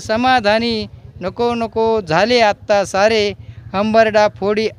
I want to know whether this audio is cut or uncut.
uncut